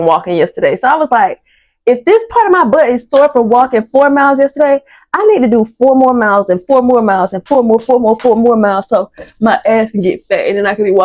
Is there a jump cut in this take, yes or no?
no